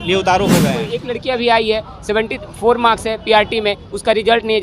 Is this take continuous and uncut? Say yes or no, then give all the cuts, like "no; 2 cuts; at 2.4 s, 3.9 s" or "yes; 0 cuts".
no; 1 cut; at 1.0 s